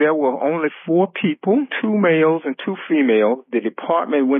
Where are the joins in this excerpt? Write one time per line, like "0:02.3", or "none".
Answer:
0:01.7
0:03.4